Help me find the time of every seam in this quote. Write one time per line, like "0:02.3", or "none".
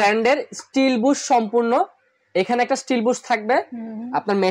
none